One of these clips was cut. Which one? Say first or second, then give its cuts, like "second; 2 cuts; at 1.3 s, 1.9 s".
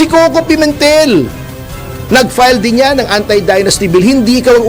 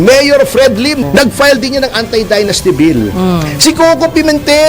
second; 1 cut; at 1.0 s